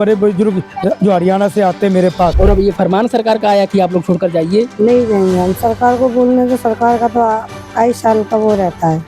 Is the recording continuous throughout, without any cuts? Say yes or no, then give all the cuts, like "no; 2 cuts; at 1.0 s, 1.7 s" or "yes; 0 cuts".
no; 2 cuts; at 2.4 s, 4.7 s